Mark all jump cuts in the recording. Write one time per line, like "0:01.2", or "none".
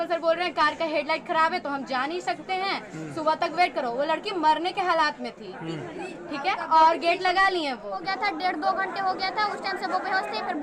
0:08.0